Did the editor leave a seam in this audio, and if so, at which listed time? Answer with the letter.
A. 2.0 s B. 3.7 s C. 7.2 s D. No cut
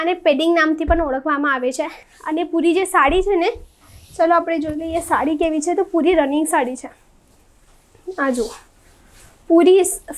A